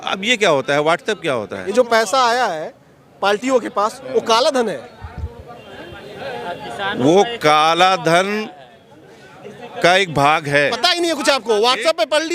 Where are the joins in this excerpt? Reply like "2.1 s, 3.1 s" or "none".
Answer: 1.7 s, 10.7 s